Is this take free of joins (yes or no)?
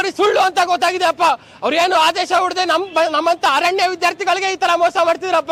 yes